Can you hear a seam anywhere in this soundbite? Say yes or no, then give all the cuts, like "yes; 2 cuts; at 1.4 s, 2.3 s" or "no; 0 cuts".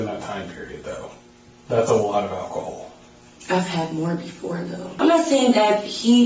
yes; 1 cut; at 4.9 s